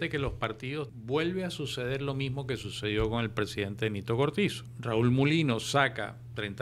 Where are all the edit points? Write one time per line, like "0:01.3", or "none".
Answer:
0:00.9
0:04.7